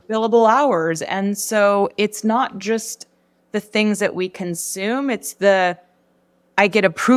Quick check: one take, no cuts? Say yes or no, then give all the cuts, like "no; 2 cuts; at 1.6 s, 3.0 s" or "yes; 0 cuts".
yes; 0 cuts